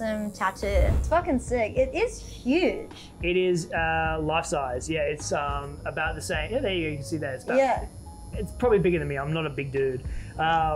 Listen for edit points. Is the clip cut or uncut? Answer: cut